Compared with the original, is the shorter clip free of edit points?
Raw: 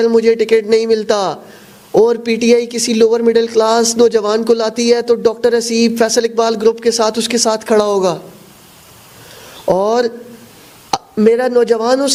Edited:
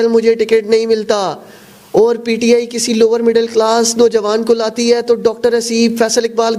yes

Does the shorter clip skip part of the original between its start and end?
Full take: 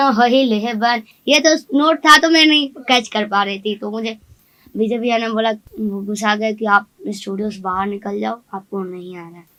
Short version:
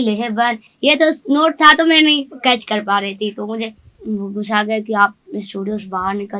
yes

